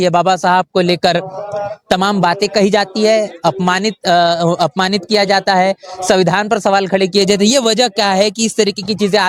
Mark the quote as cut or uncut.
uncut